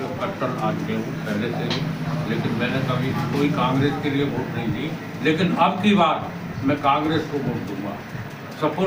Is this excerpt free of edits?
yes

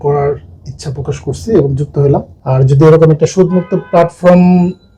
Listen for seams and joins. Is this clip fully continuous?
no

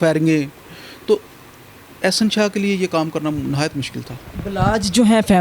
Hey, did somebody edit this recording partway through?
no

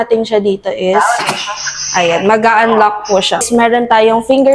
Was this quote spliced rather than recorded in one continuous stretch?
yes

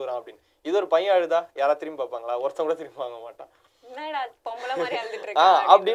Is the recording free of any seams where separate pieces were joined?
yes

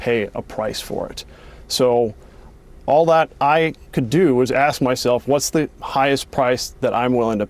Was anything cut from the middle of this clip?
no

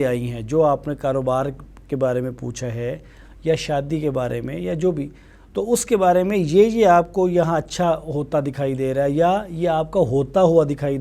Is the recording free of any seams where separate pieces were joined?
yes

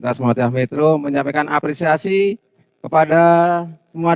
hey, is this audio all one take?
yes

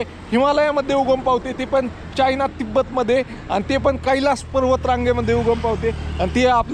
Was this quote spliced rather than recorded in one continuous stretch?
no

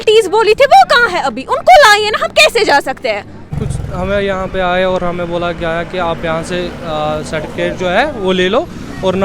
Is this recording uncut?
no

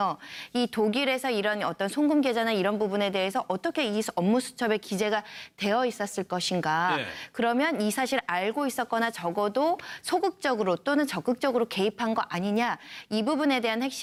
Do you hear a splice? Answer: no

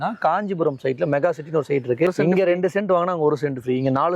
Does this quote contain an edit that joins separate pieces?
yes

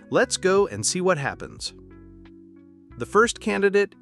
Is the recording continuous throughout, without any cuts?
no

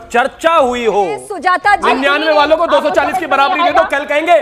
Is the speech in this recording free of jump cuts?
no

